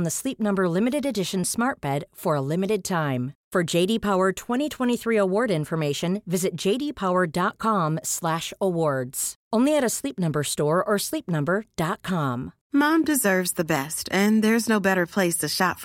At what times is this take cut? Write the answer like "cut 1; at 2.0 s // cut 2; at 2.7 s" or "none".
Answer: cut 1; at 12.5 s